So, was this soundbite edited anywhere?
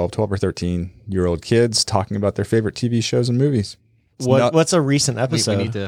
yes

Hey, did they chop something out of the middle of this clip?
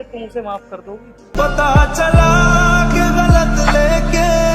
no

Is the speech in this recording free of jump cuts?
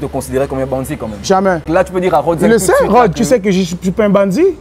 no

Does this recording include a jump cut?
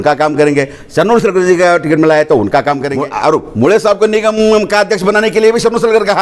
yes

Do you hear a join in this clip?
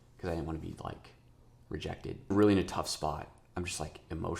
yes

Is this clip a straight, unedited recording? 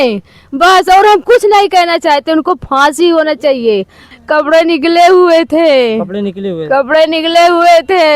no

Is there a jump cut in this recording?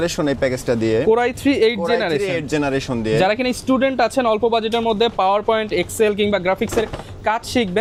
no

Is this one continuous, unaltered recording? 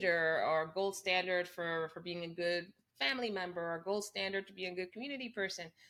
yes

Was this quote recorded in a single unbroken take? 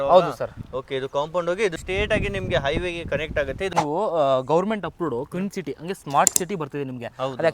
no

